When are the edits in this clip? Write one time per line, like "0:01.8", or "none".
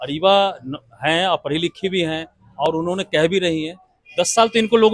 none